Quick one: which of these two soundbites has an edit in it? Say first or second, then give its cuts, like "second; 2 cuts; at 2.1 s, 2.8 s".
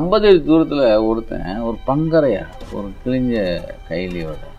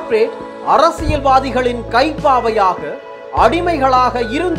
first; 1 cut; at 2.6 s